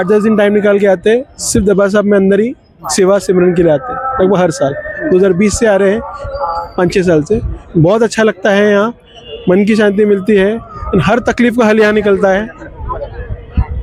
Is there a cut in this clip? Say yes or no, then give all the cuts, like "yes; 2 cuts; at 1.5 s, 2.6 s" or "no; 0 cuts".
no; 0 cuts